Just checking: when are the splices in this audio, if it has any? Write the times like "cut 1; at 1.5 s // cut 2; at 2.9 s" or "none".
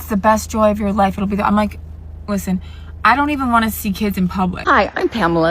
cut 1; at 4.6 s